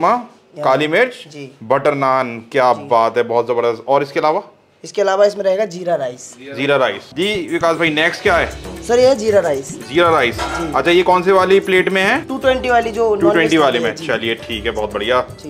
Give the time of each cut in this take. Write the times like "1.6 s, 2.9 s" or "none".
none